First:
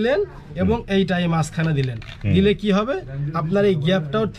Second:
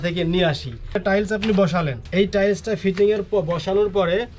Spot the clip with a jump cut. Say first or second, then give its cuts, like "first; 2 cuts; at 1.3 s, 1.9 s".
second; 2 cuts; at 1.0 s, 2.0 s